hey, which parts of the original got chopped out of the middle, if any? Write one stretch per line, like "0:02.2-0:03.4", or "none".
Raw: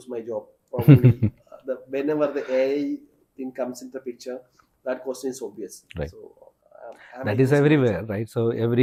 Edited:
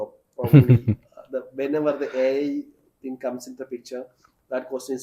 none

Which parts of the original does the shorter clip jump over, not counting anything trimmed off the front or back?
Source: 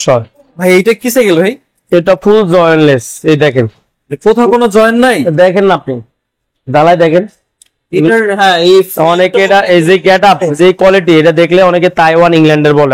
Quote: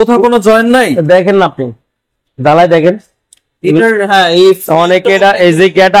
none

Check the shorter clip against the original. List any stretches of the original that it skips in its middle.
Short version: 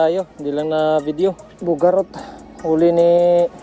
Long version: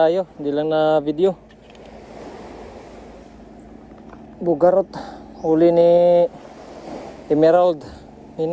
0:01.5-0:04.3

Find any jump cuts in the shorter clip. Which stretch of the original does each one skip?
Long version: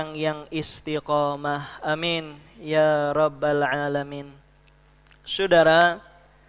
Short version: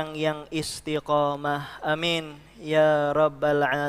none

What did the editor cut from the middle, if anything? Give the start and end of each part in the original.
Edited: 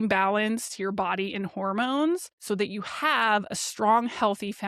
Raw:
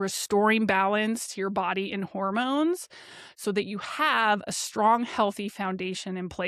0:02.9-0:03.3

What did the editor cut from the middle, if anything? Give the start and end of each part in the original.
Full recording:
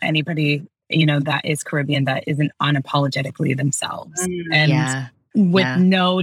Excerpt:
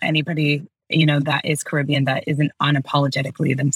none

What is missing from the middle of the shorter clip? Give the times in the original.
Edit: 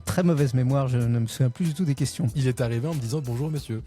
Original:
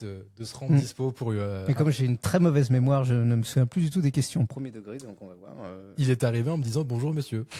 0:04.5-0:05.9

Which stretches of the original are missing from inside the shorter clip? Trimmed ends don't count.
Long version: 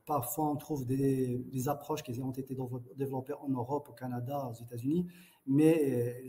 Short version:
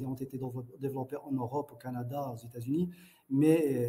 none

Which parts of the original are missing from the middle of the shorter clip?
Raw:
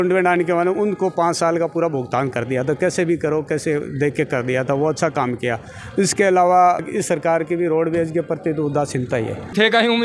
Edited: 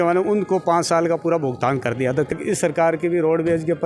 0:02.8-0:06.8

